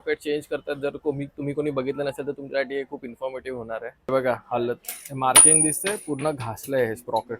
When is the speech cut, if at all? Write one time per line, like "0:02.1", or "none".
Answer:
0:03.9